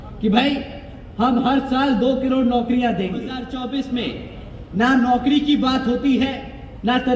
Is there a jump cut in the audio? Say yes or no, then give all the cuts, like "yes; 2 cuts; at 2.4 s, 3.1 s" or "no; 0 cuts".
yes; 1 cut; at 3.4 s